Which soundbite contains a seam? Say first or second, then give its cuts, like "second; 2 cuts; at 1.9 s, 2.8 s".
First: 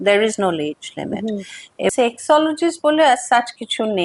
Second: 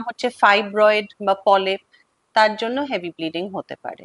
first; 1 cut; at 1.9 s